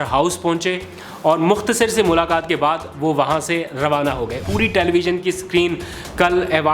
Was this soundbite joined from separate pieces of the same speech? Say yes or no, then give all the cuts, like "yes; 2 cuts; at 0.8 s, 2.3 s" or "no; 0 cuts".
yes; 1 cut; at 4.4 s